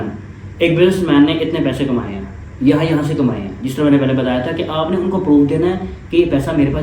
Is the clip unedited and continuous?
yes; 0 cuts

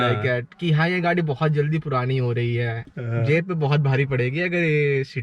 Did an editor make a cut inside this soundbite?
yes; 1 cut; at 2.9 s

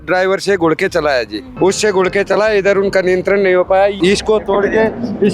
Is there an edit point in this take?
yes; 2 cuts; at 1.4 s, 4.0 s

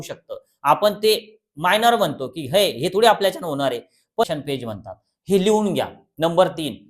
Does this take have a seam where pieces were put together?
yes; 1 cut; at 4.3 s

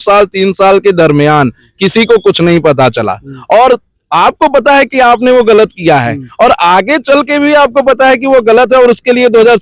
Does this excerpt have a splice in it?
no; 0 cuts

